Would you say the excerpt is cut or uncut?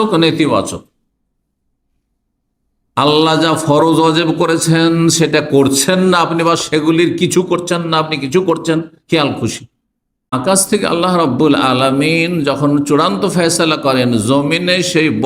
cut